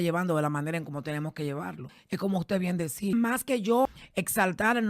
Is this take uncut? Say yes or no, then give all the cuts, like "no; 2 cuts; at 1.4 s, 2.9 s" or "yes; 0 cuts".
no; 3 cuts; at 1.9 s, 3.1 s, 4.0 s